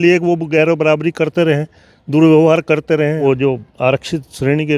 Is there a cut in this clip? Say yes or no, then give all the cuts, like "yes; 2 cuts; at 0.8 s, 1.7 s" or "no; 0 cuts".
yes; 1 cut; at 3.2 s